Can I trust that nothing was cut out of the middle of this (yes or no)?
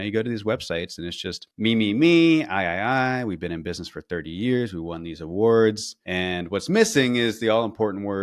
yes